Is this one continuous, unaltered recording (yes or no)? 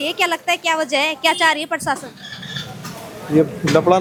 yes